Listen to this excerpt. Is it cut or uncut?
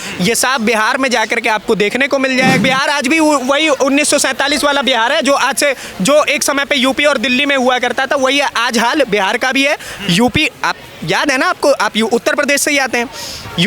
cut